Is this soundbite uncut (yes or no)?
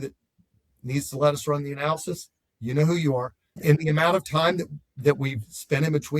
no